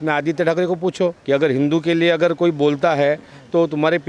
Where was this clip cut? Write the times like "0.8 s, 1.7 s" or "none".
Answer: 1.2 s